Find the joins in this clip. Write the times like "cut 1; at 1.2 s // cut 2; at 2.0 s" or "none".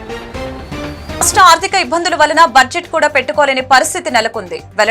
cut 1; at 1.2 s